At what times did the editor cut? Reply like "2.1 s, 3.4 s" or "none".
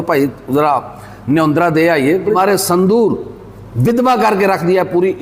2.4 s